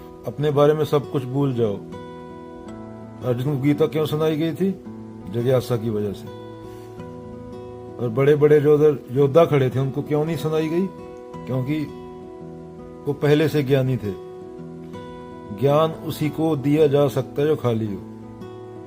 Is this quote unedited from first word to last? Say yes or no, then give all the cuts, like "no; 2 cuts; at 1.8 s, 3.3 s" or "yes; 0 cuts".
no; 1 cut; at 18.0 s